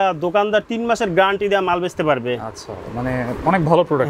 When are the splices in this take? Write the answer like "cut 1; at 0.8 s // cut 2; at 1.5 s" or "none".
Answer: none

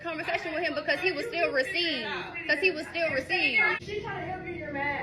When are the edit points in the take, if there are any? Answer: cut 1; at 3.8 s

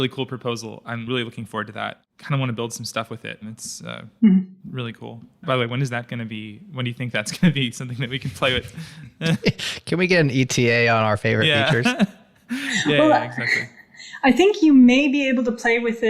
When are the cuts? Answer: cut 1; at 1.3 s

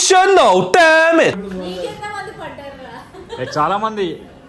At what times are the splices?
cut 1; at 1.4 s

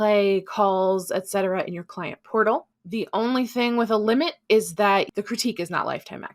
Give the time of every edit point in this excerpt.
cut 1; at 5.1 s

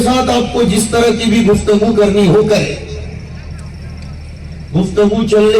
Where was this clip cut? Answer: none

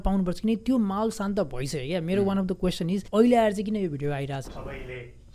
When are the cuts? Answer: cut 1; at 3.1 s // cut 2; at 4.4 s

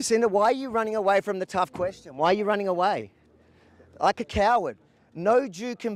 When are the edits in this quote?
none

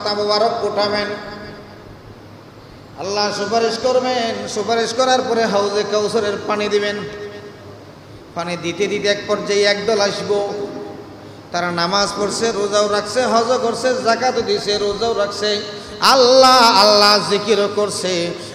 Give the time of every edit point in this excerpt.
none

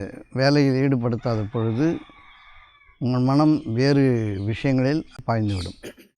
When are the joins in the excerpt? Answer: cut 1; at 5.2 s

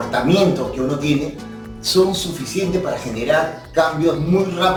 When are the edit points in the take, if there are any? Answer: none

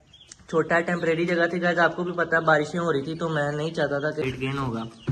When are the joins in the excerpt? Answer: cut 1; at 4.2 s

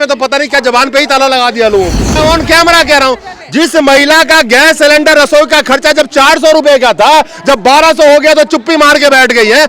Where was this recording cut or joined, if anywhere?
cut 1; at 2.2 s

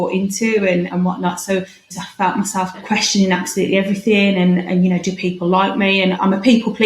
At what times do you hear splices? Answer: cut 1; at 2.0 s

